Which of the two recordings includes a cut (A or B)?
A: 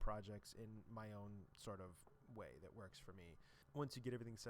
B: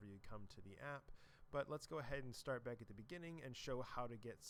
A